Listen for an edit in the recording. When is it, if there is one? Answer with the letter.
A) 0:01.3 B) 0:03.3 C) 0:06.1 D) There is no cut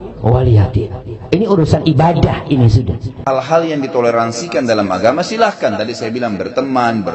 B